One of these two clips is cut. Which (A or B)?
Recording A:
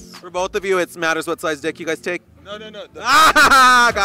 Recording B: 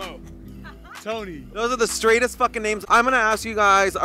B